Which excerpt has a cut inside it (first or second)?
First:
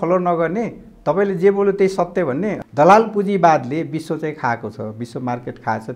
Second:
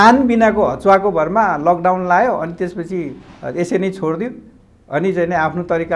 first